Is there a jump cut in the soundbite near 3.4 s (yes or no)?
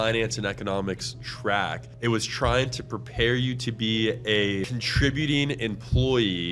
no